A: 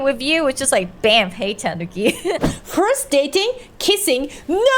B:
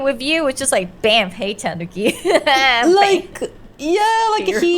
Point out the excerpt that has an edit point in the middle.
A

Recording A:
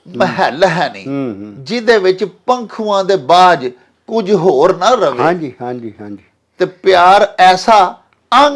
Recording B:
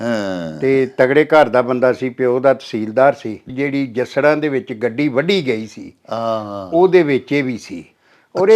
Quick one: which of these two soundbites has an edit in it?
B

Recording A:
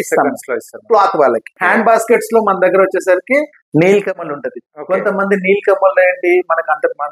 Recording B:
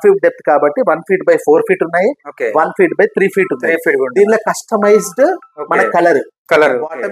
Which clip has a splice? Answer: A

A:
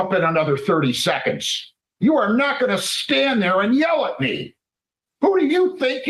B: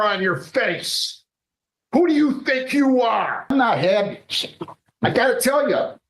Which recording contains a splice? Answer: B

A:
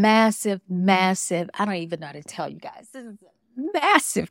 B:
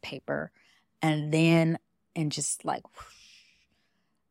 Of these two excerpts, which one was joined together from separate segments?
B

